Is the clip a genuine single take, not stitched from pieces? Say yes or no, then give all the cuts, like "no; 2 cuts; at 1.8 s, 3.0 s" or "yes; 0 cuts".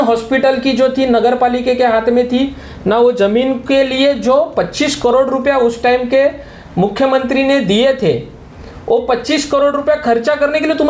yes; 0 cuts